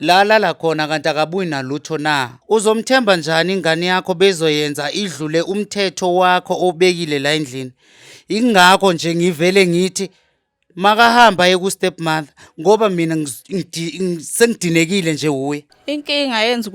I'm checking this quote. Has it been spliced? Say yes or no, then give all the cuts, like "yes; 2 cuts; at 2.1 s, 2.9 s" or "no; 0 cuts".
yes; 2 cuts; at 2.3 s, 15.7 s